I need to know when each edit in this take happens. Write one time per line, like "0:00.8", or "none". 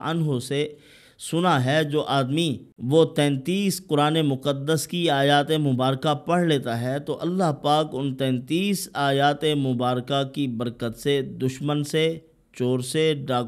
0:02.7